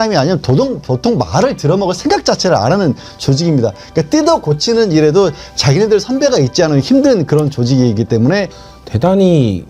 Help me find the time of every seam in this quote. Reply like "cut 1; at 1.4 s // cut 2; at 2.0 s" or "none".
cut 1; at 8.6 s